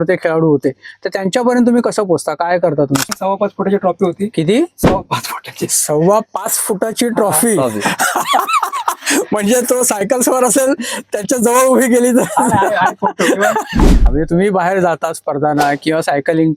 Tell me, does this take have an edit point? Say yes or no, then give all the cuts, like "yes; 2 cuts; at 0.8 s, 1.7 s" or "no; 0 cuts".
yes; 2 cuts; at 3.1 s, 14.1 s